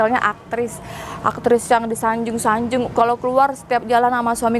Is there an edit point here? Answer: no; 0 cuts

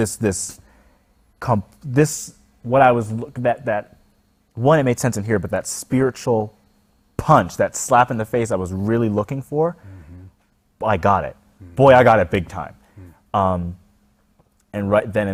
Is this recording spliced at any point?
no; 0 cuts

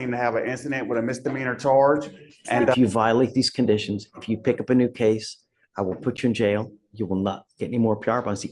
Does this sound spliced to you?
yes; 1 cut; at 2.7 s

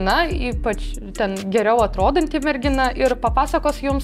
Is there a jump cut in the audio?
no; 0 cuts

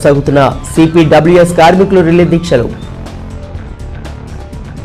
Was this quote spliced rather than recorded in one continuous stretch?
yes; 1 cut; at 2.7 s

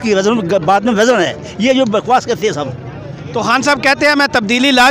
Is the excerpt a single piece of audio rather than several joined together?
yes; 0 cuts

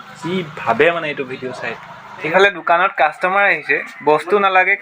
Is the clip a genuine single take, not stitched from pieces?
no; 1 cut; at 2.3 s

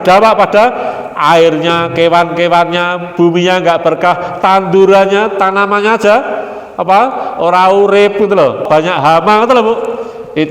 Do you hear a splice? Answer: yes; 1 cut; at 8.6 s

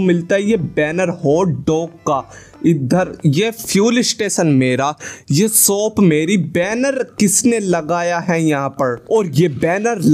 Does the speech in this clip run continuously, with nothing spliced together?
yes; 0 cuts

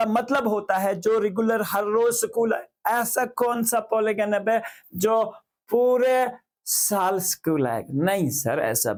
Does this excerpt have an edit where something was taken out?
no; 0 cuts

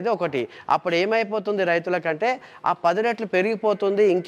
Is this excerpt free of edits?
yes; 0 cuts

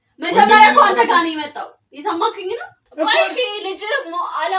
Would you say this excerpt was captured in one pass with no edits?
no; 1 cut; at 2.8 s

